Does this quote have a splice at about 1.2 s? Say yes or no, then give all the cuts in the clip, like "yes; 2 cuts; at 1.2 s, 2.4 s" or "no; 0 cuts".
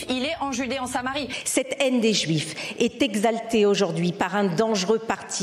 yes; 1 cut; at 1.2 s